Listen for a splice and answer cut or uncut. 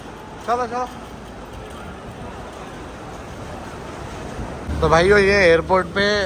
cut